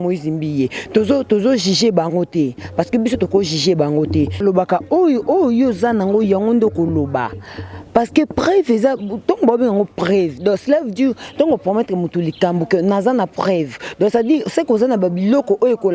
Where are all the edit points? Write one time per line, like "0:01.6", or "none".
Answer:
0:04.4